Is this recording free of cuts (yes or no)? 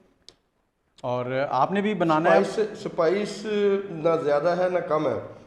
yes